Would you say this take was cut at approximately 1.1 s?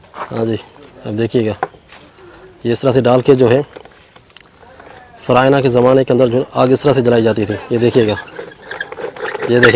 no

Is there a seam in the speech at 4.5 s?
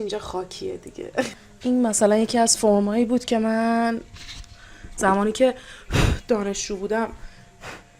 no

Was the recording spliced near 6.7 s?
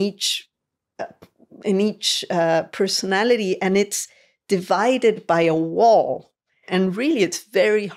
yes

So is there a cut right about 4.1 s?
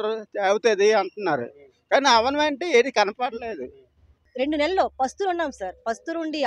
yes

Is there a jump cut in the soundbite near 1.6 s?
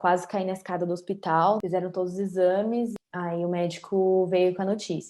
yes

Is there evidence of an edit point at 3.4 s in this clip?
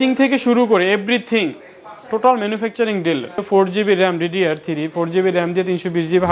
yes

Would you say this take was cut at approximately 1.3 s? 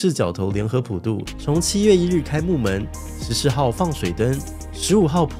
yes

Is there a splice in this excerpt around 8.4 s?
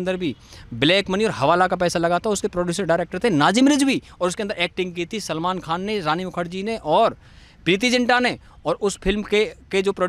no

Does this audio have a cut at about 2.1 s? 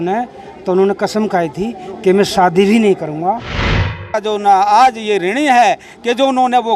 no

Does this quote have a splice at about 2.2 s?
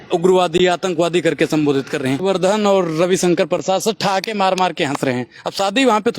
yes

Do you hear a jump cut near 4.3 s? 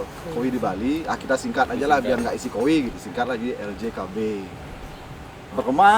no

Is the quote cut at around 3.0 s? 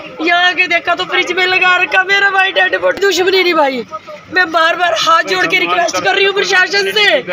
yes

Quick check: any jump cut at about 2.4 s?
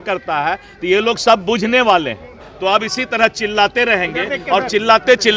yes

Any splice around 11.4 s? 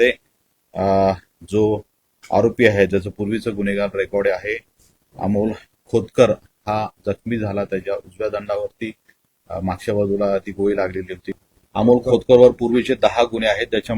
yes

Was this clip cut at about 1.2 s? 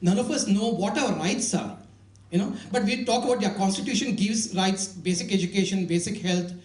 yes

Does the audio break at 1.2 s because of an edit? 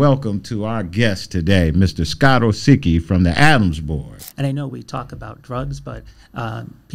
no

